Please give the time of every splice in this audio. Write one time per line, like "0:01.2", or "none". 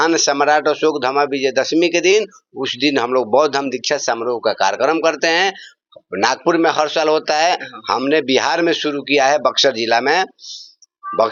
none